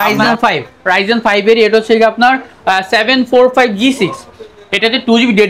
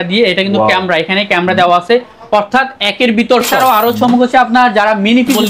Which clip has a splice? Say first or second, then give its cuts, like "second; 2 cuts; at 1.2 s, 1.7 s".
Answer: second; 1 cut; at 3.5 s